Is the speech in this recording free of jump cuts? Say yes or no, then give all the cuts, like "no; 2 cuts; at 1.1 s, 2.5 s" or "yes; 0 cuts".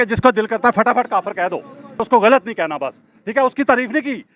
no; 1 cut; at 2.0 s